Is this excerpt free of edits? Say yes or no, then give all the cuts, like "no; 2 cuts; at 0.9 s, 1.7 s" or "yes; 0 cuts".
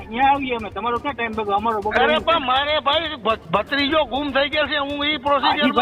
yes; 0 cuts